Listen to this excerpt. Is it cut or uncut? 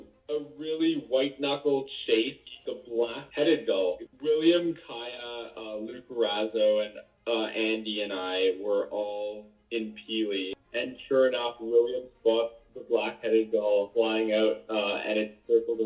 cut